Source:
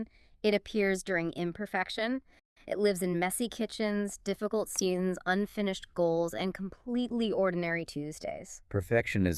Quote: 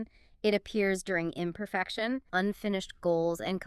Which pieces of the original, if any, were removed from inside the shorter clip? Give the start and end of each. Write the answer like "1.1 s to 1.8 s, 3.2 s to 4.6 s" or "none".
2.3 s to 5.2 s